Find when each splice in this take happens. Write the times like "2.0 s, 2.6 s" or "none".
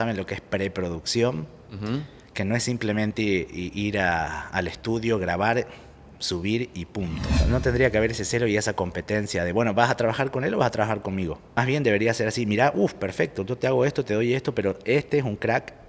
7.4 s, 11.4 s

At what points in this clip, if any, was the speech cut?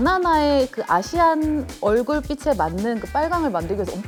none

